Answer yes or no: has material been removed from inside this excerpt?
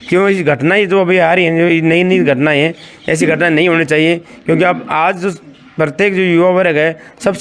no